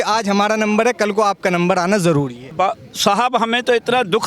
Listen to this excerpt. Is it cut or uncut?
cut